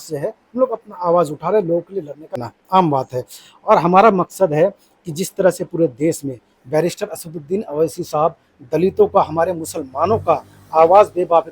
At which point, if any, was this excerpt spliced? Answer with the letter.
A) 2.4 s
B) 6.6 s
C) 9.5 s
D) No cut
A